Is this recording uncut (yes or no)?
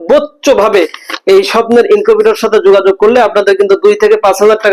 yes